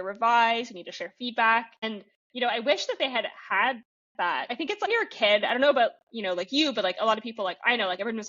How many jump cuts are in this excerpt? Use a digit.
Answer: 2